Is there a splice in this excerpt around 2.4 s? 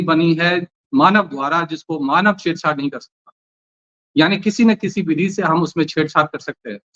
no; 0 cuts

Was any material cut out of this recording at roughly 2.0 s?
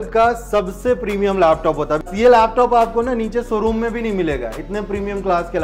yes; 1 cut; at 2.0 s

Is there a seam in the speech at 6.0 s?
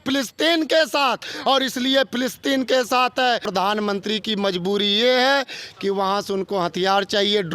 no; 1 cut; at 3.5 s

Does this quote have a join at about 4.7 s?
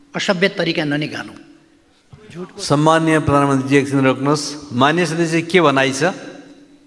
no; 1 cut; at 2.0 s

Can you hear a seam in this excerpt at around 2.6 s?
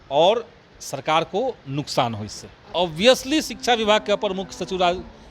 yes; 1 cut; at 2.6 s

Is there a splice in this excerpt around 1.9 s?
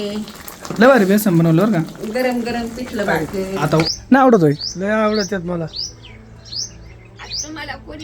no; 1 cut; at 4.0 s

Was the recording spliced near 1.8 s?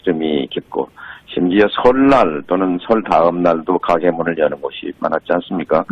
yes; 1 cut; at 1.8 s

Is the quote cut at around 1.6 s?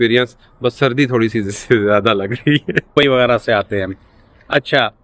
no; 1 cut; at 2.9 s

